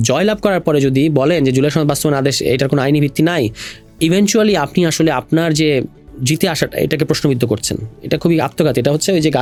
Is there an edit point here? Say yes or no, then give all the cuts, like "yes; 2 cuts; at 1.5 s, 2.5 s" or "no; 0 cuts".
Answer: no; 0 cuts